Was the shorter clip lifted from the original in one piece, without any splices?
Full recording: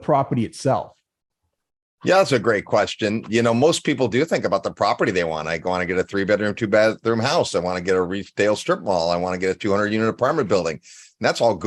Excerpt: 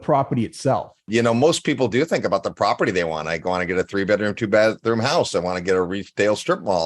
no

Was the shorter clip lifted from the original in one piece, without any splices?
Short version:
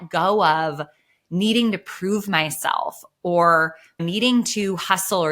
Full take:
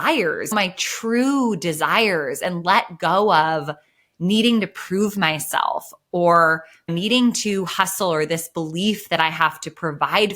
yes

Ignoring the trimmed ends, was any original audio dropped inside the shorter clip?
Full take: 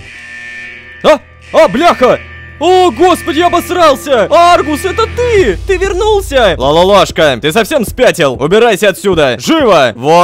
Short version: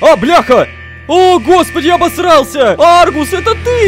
no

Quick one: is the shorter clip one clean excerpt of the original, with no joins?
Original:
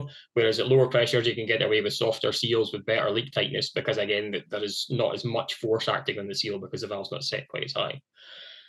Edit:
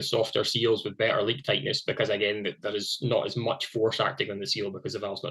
yes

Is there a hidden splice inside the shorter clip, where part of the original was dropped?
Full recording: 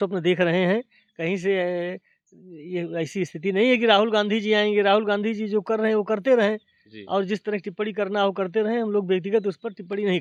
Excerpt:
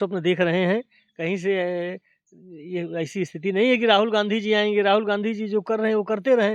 no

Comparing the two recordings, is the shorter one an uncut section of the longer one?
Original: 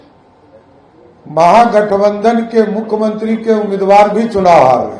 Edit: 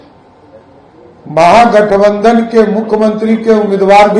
yes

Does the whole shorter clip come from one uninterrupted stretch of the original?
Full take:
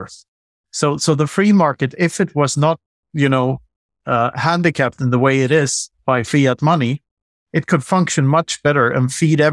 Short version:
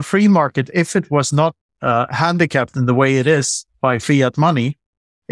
no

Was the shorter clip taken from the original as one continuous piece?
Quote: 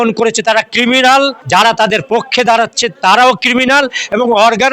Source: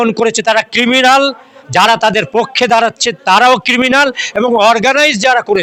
no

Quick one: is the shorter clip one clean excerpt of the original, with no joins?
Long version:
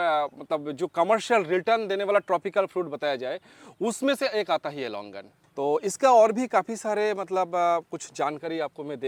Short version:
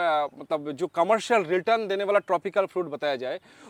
yes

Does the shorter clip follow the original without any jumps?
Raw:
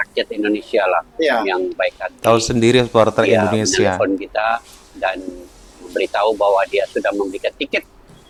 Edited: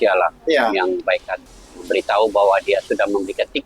no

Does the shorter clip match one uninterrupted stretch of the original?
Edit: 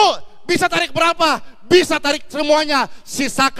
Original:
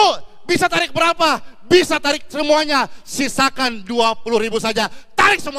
yes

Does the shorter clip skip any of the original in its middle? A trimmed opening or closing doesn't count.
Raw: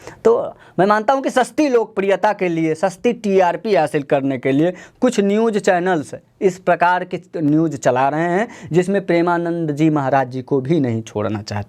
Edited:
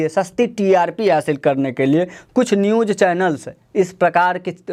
no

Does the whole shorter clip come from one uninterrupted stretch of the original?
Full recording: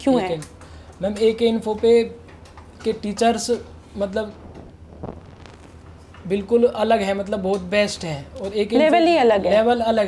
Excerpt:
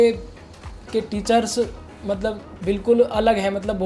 no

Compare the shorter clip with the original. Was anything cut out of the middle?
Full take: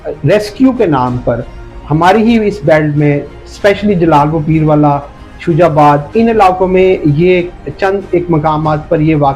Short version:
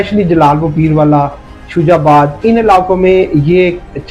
no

